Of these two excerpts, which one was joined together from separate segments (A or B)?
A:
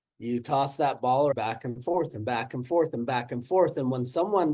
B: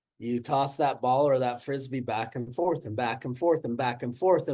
A